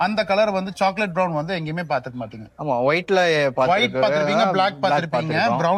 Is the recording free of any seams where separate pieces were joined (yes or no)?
yes